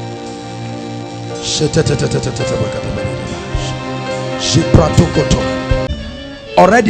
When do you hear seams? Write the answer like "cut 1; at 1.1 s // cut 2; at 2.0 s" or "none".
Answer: cut 1; at 5.9 s

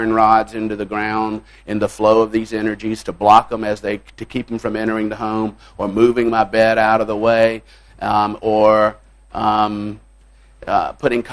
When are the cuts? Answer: none

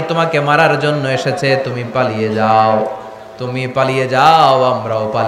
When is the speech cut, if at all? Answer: none

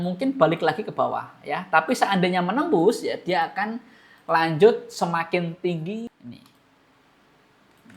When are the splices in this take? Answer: cut 1; at 6.0 s

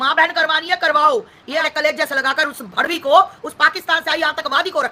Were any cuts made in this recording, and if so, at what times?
cut 1; at 1.6 s

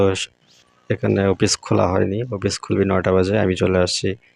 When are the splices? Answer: none

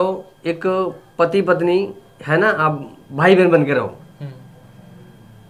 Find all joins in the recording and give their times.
none

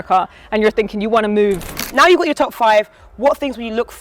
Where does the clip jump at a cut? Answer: cut 1; at 1.9 s

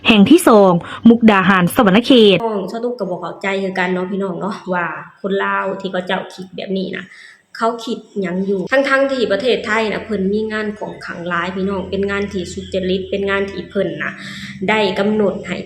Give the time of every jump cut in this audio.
cut 1; at 2.6 s // cut 2; at 8.7 s

